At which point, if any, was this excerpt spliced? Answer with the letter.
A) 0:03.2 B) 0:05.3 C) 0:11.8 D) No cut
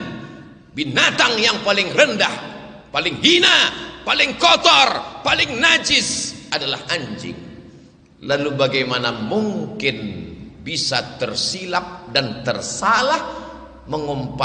D